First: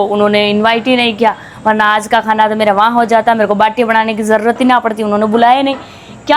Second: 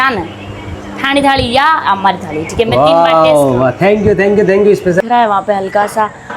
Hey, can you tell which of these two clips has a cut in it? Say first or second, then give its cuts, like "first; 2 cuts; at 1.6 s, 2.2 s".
second; 1 cut; at 5.0 s